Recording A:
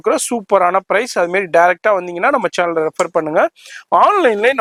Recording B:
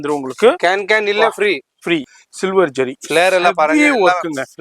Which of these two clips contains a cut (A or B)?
B